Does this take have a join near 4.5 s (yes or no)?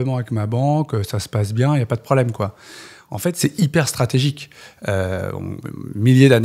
no